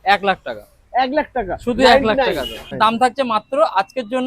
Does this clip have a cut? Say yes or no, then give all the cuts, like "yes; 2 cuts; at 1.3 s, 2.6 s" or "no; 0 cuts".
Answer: yes; 1 cut; at 2.8 s